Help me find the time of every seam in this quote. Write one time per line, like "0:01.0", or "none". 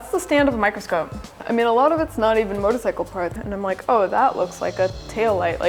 0:01.4
0:03.4